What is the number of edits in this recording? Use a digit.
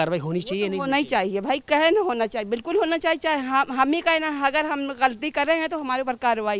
0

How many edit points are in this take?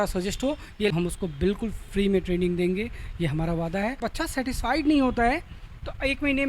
2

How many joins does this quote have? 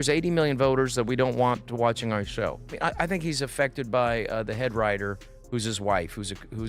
1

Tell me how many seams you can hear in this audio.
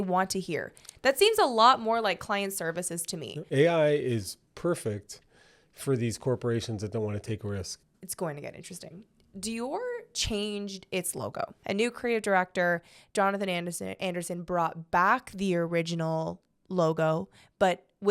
3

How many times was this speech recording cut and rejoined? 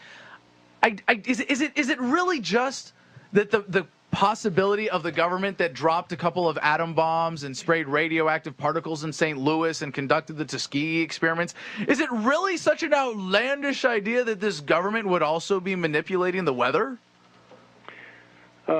1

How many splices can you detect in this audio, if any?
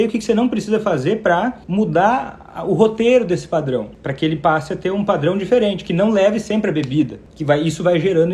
3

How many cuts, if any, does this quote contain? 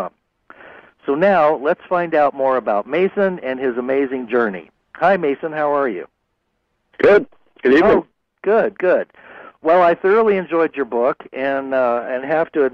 1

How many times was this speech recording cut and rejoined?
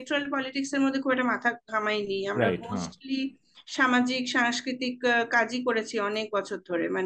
0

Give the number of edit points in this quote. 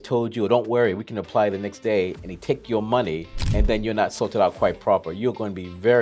1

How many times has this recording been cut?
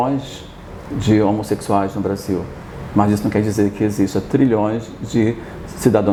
0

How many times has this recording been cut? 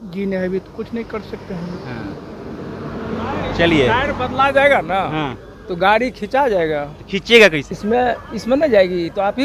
0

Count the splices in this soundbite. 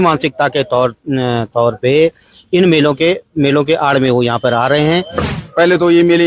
1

